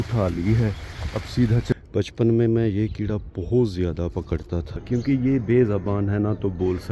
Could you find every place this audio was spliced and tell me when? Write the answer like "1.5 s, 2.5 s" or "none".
1.7 s, 4.8 s